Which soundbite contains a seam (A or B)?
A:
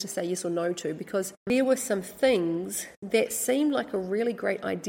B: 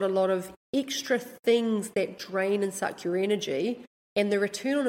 A